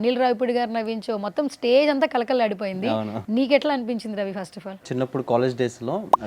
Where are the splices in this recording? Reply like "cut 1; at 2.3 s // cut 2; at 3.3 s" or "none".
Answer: cut 1; at 3.2 s // cut 2; at 4.9 s